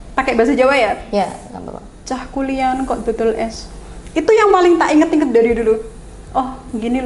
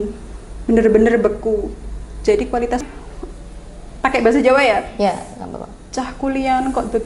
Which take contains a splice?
second; 1 cut; at 2.8 s

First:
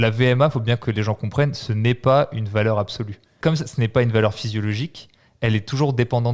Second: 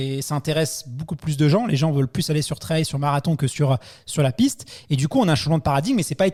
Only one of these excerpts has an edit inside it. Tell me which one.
first; 1 cut; at 3.3 s

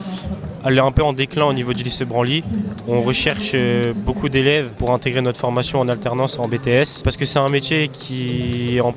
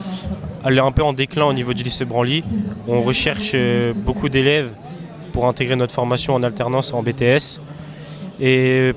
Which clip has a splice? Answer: first; 2 cuts; at 4.7 s, 7.1 s

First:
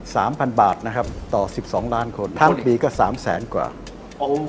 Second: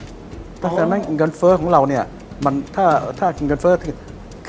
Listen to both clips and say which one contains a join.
first; 2 cuts; at 1.2 s, 2.4 s

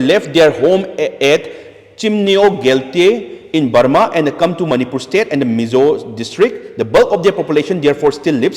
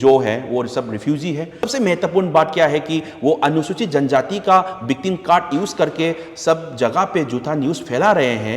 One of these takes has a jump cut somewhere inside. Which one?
second; 1 cut; at 1.7 s

